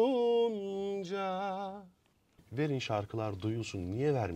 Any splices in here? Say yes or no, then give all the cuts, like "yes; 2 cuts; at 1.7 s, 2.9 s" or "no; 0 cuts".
yes; 1 cut; at 2.4 s